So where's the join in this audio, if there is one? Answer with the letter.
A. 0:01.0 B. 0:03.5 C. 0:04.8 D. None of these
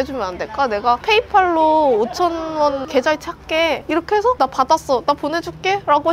A